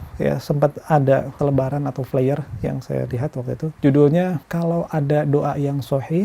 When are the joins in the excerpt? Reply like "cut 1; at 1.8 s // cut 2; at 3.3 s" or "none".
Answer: cut 1; at 1.3 s // cut 2; at 3.7 s // cut 3; at 4.4 s

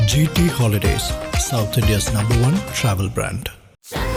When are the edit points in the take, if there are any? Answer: none

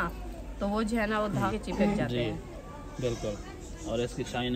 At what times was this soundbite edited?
cut 1; at 1.5 s

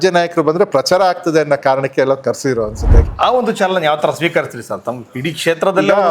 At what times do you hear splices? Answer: cut 1; at 3.0 s

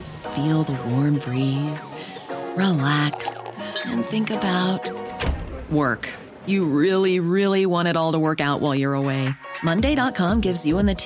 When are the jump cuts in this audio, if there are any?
none

